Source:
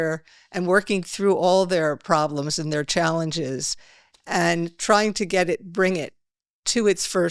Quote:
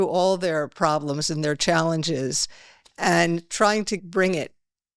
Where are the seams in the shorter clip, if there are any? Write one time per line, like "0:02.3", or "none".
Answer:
0:04.0